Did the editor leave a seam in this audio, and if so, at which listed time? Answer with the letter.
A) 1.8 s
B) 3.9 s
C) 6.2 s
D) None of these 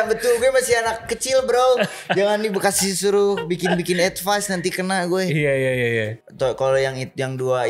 C